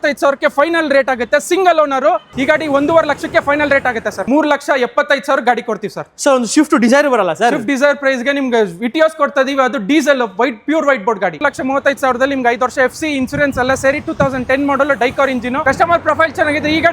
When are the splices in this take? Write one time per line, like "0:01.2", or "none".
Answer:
0:02.3
0:04.2
0:11.4
0:15.6